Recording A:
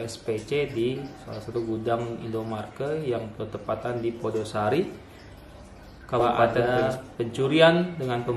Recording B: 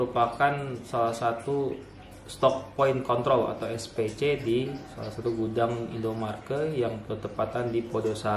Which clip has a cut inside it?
A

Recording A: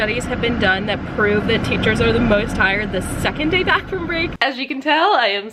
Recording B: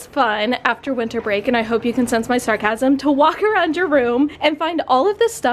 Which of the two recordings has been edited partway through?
A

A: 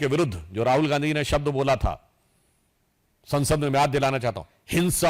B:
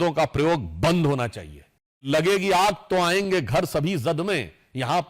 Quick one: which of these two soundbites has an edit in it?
B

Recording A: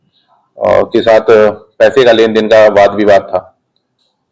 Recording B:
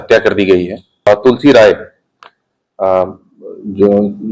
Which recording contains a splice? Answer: B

